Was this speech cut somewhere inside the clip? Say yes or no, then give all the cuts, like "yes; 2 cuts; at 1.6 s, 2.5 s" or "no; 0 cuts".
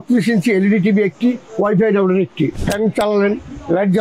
yes; 1 cut; at 2.6 s